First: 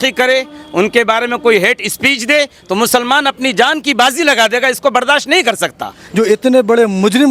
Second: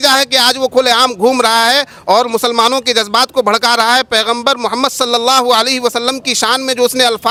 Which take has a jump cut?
first; 1 cut; at 5.9 s

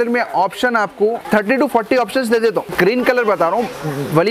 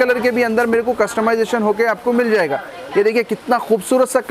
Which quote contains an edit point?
first; 2 cuts; at 1.2 s, 2.7 s

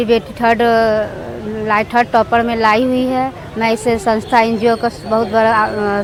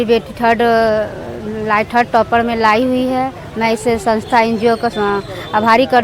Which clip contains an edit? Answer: second; 1 cut; at 4.9 s

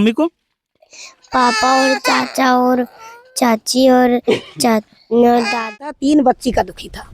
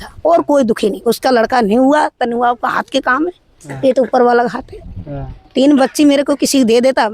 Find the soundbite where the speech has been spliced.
first; 1 cut; at 5.8 s

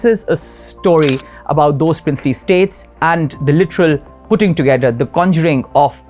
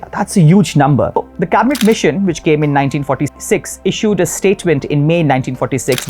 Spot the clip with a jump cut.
second; 2 cuts; at 1.2 s, 3.3 s

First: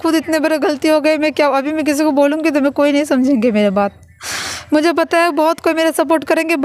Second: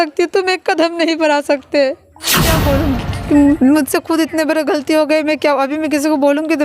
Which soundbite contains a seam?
second; 1 cut; at 2.6 s

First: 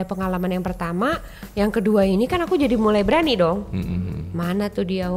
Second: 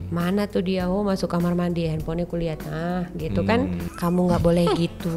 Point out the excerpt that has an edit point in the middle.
second; 1 cut; at 3.9 s

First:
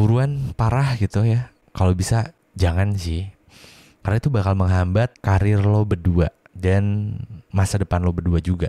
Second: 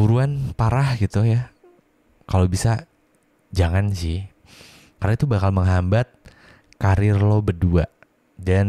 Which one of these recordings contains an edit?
first; 4 cuts; at 1.6 s, 2.4 s, 5.2 s, 6.5 s

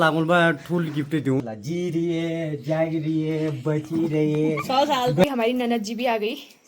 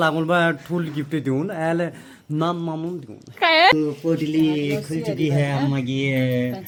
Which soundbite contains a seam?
first; 2 cuts; at 1.4 s, 5.2 s

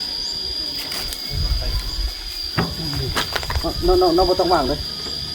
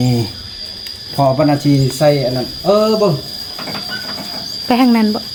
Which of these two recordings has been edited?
first; 1 cut; at 1.1 s

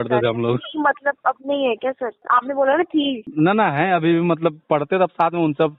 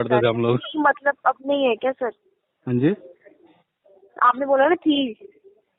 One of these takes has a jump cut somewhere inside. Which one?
first; 2 cuts; at 2.2 s, 3.2 s

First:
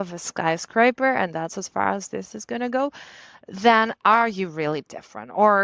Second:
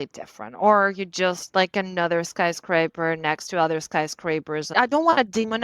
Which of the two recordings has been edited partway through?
second; 1 cut; at 4.7 s

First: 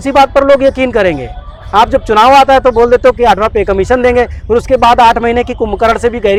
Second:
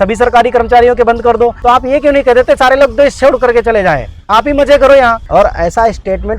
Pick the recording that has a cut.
second; 2 cuts; at 1.6 s, 5.2 s

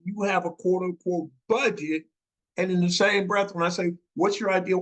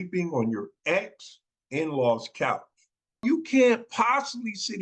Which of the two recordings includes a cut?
second; 1 cut; at 3.2 s

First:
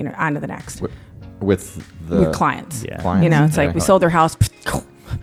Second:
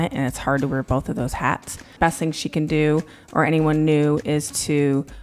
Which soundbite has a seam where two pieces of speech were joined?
second; 1 cut; at 1.9 s

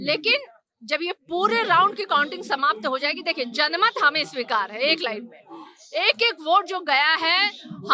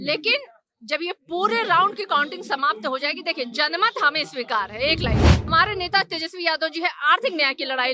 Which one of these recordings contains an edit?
second; 1 cut; at 5.5 s

